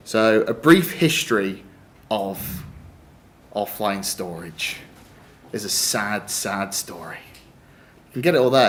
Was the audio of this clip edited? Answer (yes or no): no